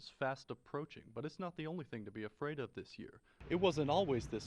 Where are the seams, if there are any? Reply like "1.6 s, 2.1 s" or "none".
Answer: 3.4 s